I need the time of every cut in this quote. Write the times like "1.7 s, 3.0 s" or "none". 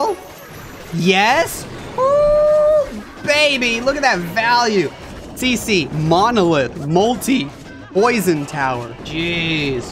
9.0 s